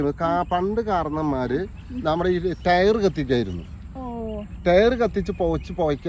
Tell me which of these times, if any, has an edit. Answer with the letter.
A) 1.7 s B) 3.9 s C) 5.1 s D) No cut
D